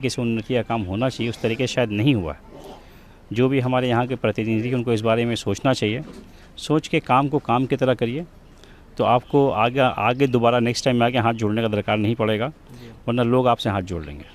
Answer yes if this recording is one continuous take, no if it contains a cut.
yes